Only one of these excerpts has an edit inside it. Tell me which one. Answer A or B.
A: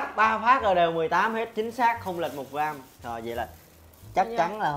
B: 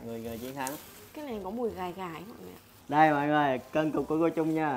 B